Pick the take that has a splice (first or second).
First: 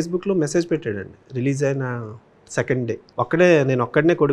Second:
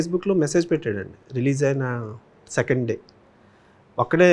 first